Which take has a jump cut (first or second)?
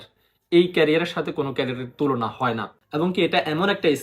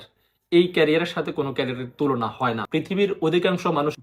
first